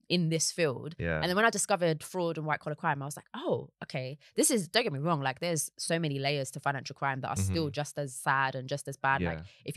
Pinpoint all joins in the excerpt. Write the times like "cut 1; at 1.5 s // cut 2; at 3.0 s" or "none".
none

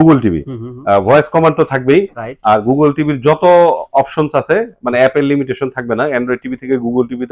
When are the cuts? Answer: none

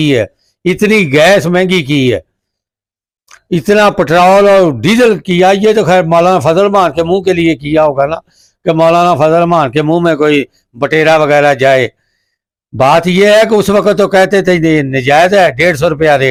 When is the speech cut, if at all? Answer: none

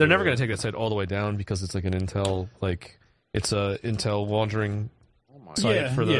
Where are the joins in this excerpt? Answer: cut 1; at 1.7 s

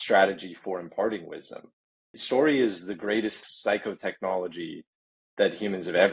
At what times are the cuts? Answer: cut 1; at 2.1 s // cut 2; at 3.5 s

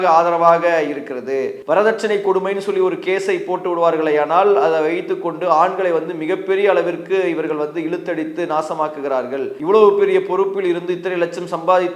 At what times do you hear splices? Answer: cut 1; at 1.6 s // cut 2; at 9.5 s

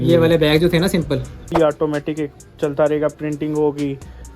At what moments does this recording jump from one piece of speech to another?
cut 1; at 1.4 s

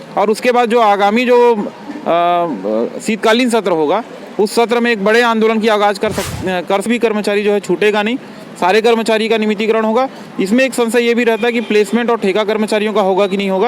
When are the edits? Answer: cut 1; at 6.9 s

